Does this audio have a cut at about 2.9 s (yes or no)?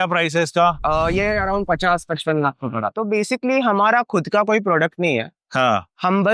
yes